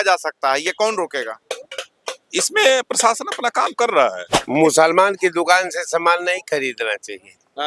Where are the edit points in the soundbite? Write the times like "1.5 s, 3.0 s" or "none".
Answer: 4.3 s